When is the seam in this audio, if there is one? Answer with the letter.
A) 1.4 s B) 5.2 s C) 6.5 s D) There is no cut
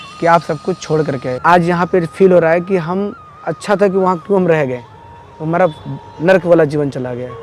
A